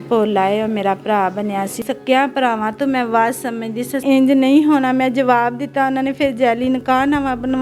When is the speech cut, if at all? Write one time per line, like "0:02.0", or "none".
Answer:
0:01.8
0:04.0